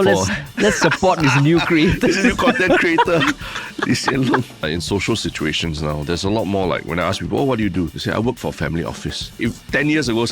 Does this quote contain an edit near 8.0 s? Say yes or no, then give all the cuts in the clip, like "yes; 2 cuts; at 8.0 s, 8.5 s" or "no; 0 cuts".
yes; 3 cuts; at 4.6 s, 8.0 s, 9.4 s